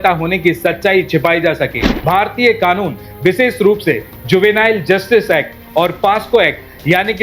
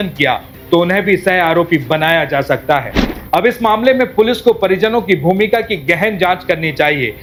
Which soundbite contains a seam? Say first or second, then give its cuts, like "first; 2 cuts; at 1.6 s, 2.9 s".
first; 1 cut; at 1.9 s